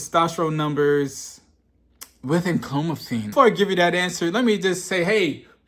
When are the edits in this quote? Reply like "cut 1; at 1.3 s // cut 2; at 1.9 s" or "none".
cut 1; at 3.3 s